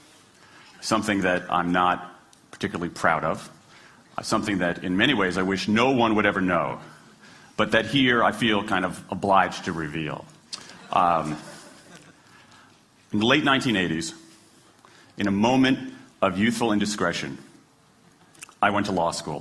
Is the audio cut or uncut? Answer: cut